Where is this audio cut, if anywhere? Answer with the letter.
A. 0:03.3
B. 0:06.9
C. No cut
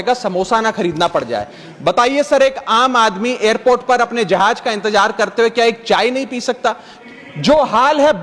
B